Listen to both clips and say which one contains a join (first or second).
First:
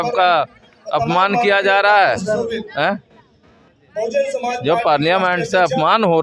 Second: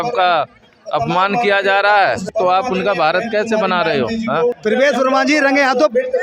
second